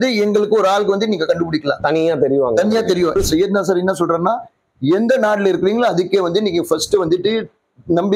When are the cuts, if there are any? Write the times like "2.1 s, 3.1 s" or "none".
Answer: 3.1 s